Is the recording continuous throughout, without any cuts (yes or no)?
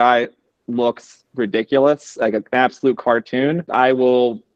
no